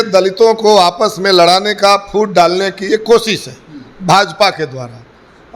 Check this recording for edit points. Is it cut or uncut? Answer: uncut